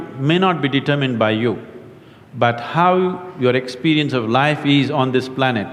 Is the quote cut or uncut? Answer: uncut